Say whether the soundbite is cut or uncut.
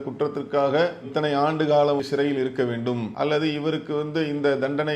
cut